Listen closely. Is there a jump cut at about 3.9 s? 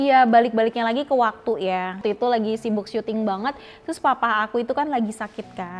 no; 1 cut; at 2.0 s

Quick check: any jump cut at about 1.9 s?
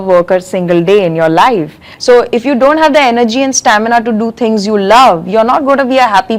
yes; 1 cut; at 1.9 s

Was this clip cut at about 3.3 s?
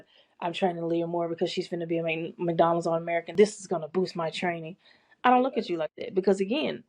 yes; 1 cut; at 3.3 s

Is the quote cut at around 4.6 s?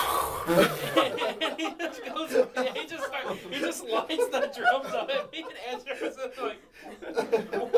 no; 0 cuts

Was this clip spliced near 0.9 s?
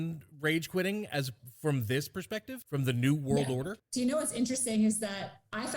no; 2 cuts; at 2.6 s, 3.8 s

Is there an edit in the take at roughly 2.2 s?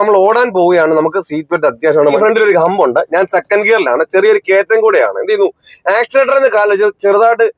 yes; 1 cut; at 2.2 s

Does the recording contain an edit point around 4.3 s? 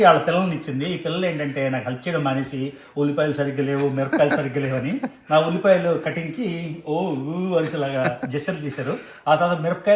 no; 0 cuts

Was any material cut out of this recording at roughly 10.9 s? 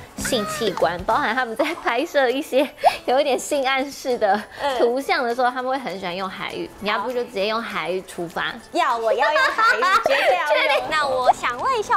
yes; 1 cut; at 10.9 s

